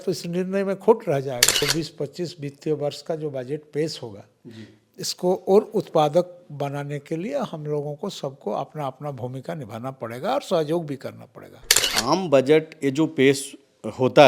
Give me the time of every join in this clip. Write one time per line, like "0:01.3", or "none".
0:01.6
0:11.9